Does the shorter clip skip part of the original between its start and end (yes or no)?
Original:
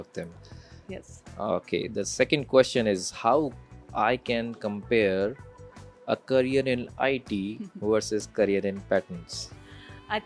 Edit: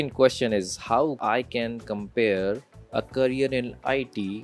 yes